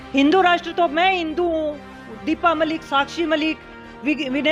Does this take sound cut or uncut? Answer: uncut